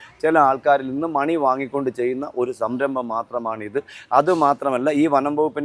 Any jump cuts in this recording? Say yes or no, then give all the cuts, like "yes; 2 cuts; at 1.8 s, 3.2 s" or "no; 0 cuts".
no; 0 cuts